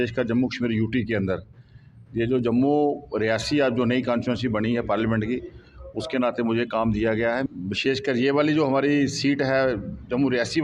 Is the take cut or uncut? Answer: cut